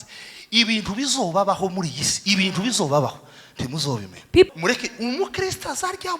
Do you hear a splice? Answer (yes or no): yes